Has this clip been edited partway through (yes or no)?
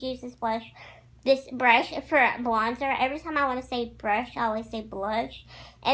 no